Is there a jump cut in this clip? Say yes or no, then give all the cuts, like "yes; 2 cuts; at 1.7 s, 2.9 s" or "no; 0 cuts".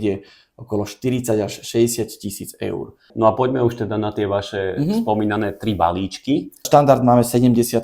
yes; 2 cuts; at 3.1 s, 6.6 s